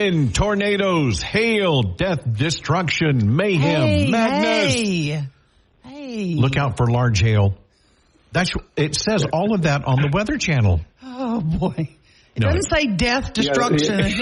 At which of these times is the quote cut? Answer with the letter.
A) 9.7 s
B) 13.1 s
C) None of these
B